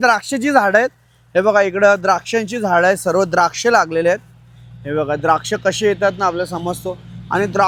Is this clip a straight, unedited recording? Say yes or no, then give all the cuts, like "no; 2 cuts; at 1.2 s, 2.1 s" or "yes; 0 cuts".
yes; 0 cuts